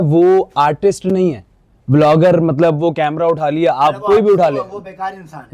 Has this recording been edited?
no; 0 cuts

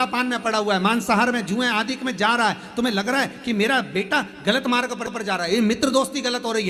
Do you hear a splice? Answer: no; 0 cuts

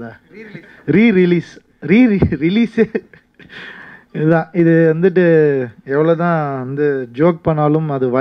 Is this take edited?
no; 0 cuts

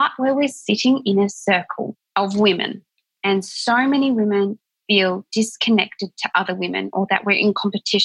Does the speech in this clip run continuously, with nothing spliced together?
yes; 0 cuts

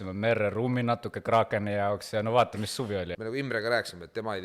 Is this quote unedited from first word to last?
no; 1 cut; at 3.1 s

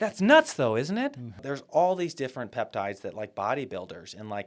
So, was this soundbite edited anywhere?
yes; 1 cut; at 1.5 s

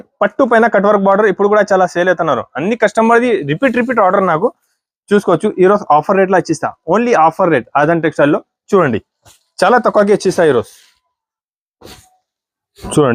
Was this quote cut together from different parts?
no; 0 cuts

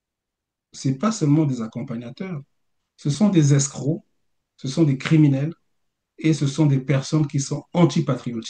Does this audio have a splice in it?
no; 0 cuts

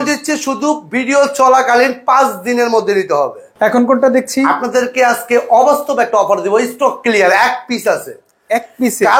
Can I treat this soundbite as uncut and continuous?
yes; 0 cuts

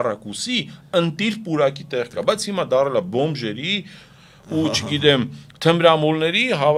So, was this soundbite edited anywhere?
no; 0 cuts

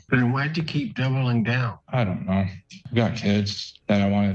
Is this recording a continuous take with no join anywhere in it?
no; 2 cuts; at 1.7 s, 2.8 s

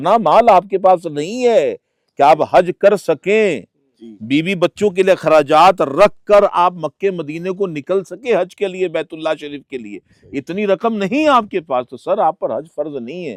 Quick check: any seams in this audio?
no; 0 cuts

